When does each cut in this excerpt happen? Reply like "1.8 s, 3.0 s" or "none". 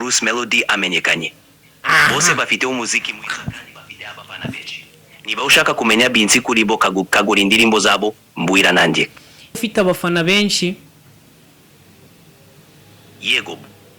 9.6 s

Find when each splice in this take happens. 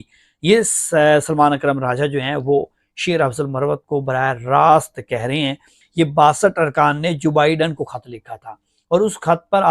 5.8 s

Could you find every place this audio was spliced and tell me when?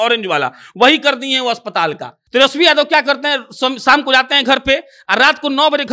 2.1 s

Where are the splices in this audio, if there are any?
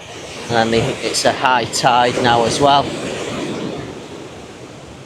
none

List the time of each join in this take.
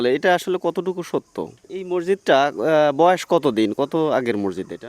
1.6 s

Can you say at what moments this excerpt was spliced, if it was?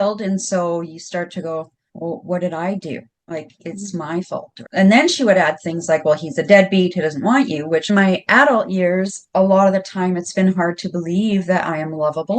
4.6 s, 7.9 s

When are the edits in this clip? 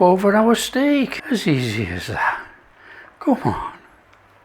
1.2 s

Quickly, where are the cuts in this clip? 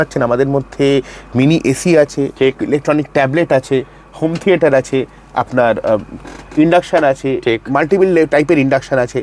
none

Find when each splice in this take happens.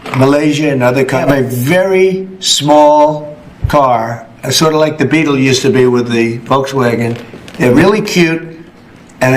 1.2 s, 7.7 s

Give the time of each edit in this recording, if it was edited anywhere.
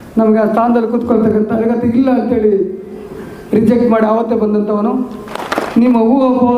5.4 s

